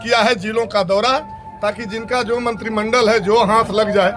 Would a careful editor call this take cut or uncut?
uncut